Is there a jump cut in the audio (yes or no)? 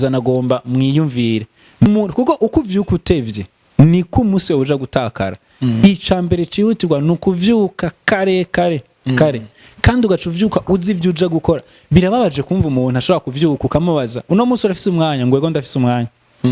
yes